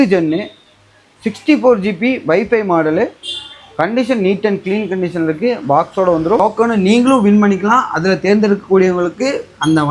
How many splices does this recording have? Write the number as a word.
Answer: one